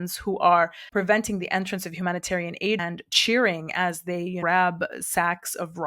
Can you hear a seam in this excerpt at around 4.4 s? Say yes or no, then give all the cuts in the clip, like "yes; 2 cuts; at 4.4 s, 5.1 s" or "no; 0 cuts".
yes; 2 cuts; at 2.8 s, 4.4 s